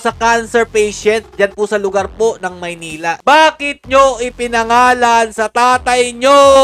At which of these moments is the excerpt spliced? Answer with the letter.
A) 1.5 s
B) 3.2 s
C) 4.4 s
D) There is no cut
B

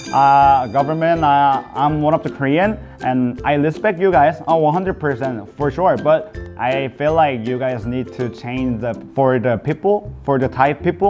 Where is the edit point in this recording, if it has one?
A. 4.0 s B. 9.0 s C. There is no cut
B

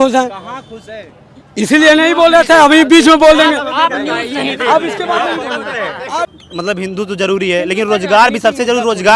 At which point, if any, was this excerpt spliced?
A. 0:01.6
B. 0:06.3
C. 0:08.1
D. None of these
B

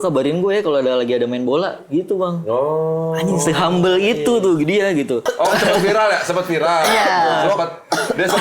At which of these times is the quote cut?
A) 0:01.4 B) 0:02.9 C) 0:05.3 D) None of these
C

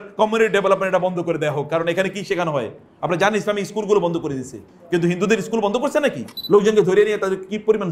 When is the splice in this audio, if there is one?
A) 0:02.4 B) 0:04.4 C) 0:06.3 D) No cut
C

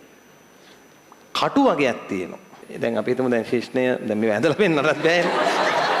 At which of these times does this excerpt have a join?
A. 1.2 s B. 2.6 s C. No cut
B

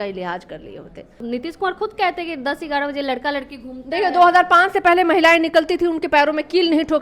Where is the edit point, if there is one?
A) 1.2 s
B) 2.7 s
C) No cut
A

